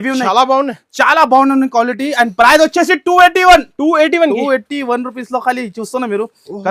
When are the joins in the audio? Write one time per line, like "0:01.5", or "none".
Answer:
none